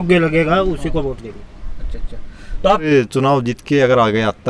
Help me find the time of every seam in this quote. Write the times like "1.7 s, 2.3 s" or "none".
2.8 s